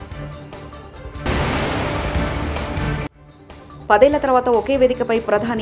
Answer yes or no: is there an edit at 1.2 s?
yes